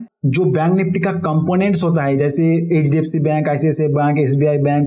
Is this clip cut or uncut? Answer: uncut